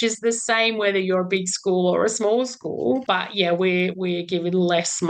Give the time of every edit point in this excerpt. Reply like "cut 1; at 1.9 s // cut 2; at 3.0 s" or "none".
cut 1; at 3.0 s // cut 2; at 3.9 s